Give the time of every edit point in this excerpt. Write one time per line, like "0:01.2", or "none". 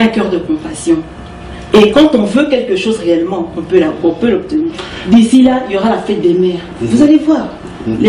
0:04.9

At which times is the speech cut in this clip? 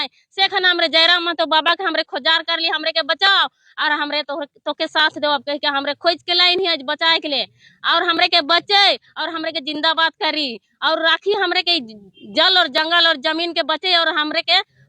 none

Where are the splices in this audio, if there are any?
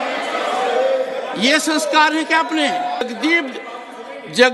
0:03.0

